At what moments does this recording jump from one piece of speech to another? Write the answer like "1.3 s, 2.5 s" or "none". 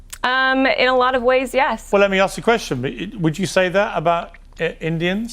1.9 s